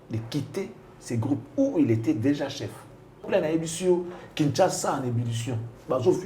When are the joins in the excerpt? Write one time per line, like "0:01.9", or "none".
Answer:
0:03.3